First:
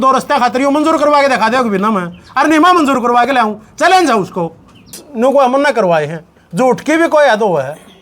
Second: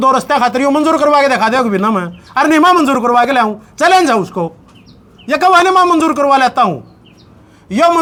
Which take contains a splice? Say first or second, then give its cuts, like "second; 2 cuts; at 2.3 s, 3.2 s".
first; 1 cut; at 5.0 s